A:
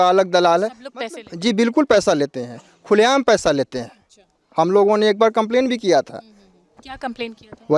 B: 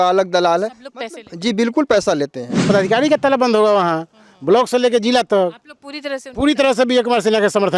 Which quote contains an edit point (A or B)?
B